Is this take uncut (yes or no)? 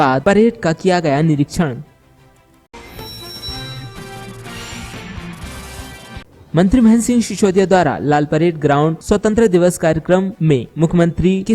no